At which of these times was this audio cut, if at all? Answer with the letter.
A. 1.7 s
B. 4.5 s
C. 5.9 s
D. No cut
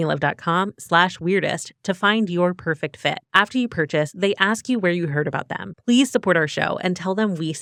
D